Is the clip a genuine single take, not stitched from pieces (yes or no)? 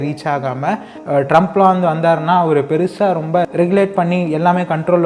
no